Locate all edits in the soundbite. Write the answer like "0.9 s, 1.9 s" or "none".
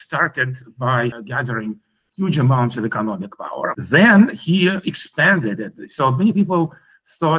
1.2 s, 3.8 s